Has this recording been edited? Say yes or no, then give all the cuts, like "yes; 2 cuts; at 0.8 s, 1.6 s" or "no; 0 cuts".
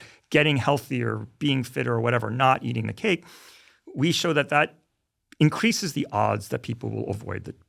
no; 0 cuts